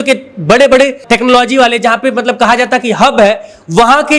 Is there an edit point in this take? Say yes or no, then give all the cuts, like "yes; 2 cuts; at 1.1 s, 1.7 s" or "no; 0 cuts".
yes; 1 cut; at 1.0 s